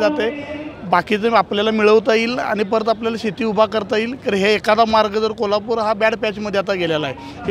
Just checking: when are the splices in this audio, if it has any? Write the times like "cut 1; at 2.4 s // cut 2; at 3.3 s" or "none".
none